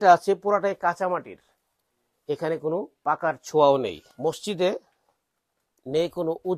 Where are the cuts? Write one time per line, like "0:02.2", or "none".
0:04.1